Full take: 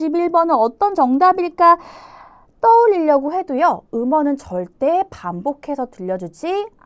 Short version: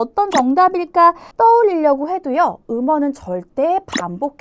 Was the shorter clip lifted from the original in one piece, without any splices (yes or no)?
no